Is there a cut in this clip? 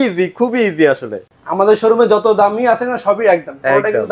yes; 1 cut; at 1.2 s

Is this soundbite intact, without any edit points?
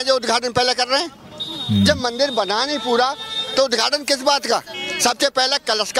yes; 0 cuts

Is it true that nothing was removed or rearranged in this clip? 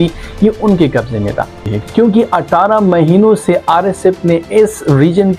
no; 1 cut; at 1.6 s

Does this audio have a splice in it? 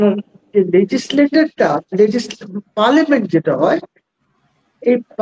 no; 0 cuts

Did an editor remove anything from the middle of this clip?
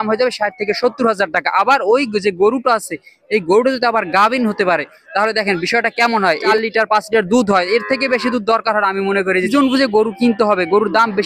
yes; 2 cuts; at 6.5 s, 9.5 s

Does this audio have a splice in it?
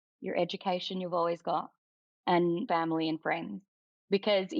yes; 1 cut; at 2.6 s

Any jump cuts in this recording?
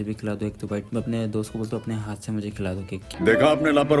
no; 0 cuts

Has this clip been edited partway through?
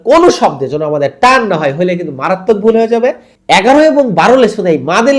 yes; 1 cut; at 3.3 s

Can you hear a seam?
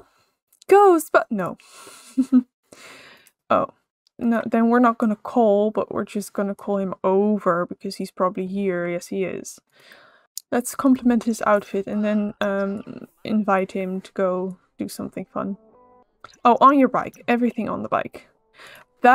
no; 0 cuts

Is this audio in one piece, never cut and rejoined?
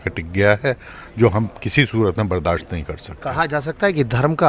yes; 0 cuts

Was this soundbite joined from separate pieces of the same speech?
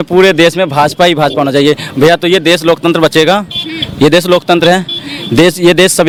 no; 0 cuts

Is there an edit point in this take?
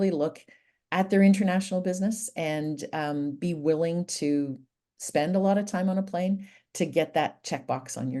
no; 0 cuts

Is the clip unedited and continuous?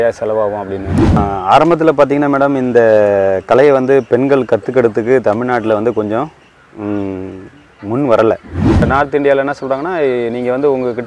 no; 2 cuts; at 1.2 s, 8.9 s

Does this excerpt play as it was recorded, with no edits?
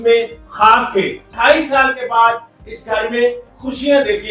no; 1 cut; at 1.2 s

